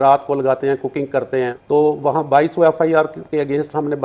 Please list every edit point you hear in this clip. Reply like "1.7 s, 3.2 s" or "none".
1.6 s